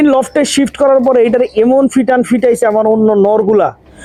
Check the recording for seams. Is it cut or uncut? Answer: uncut